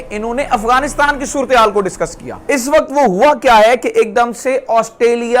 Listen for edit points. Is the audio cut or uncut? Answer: cut